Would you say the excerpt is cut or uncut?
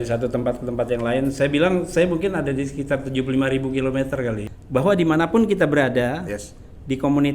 cut